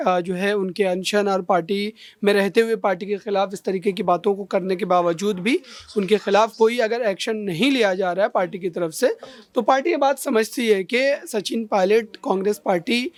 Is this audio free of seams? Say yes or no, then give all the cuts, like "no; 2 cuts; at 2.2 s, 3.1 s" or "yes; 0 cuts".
yes; 0 cuts